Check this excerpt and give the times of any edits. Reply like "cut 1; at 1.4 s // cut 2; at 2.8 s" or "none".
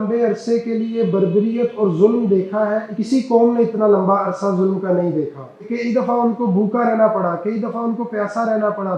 cut 1; at 3.0 s // cut 2; at 5.7 s